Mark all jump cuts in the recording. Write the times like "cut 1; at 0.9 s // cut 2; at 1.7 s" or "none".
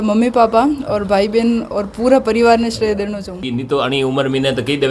cut 1; at 3.5 s

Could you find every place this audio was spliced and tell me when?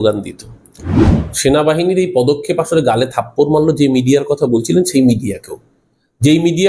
cut 1; at 1.1 s

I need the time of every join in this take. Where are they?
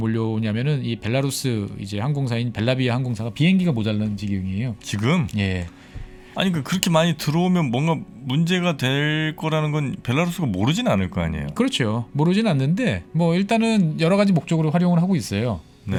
none

